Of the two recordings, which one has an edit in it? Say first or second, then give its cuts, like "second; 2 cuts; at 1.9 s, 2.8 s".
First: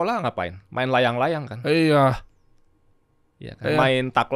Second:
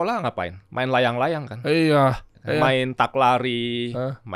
second; 1 cut; at 2.3 s